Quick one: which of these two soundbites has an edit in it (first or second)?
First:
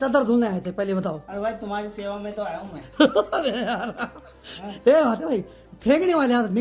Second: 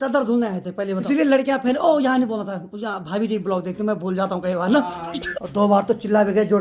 second